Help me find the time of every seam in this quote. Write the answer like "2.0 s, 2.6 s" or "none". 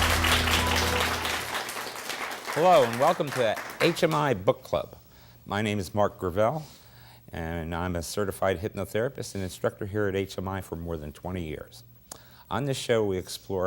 3.6 s